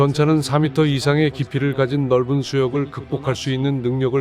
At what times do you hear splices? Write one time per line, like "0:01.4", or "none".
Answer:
none